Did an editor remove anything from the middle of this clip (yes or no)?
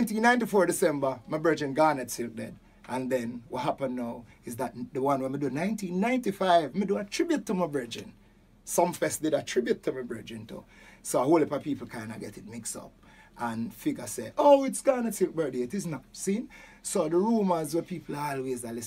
no